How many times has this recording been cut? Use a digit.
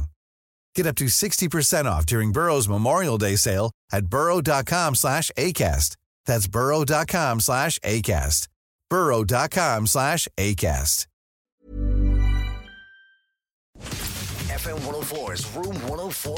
1